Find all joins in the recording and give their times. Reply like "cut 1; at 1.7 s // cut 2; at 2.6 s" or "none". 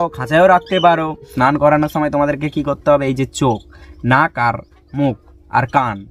cut 1; at 1.3 s